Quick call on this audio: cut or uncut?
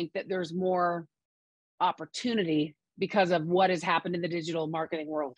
uncut